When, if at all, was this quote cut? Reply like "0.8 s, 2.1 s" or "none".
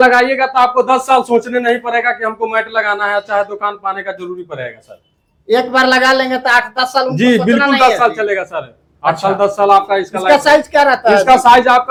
none